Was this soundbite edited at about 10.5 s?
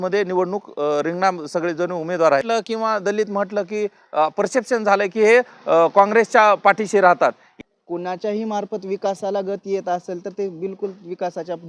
no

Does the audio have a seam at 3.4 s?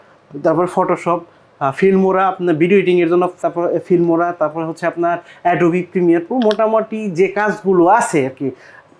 no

